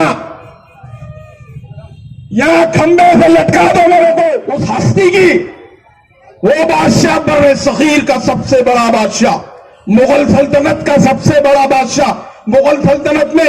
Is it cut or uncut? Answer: cut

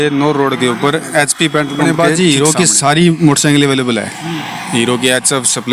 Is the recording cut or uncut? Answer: cut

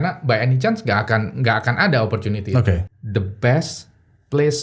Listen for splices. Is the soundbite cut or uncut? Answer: cut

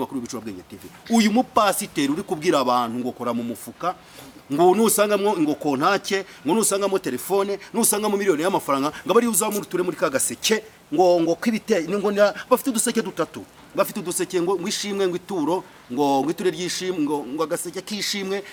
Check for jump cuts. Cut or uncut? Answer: uncut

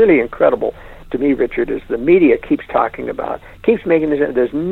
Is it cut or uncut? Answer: uncut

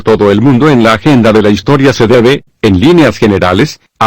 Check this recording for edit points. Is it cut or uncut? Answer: cut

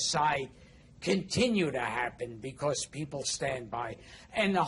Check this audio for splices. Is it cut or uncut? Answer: uncut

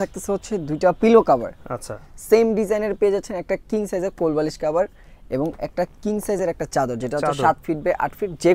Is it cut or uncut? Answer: uncut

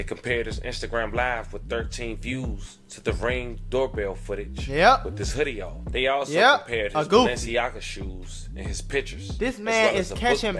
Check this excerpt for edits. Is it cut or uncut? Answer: uncut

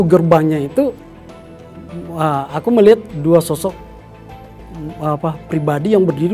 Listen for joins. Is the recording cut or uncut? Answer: uncut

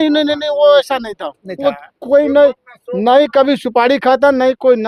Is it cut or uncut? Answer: uncut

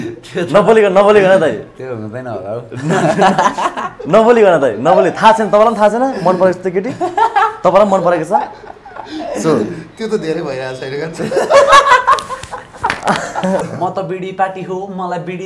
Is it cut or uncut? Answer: cut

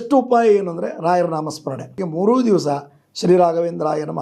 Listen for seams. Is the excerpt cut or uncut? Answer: cut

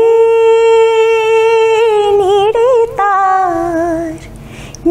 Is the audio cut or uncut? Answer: uncut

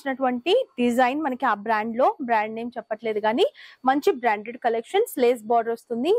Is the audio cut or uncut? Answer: uncut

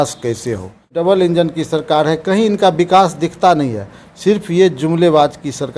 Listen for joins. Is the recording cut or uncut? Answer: cut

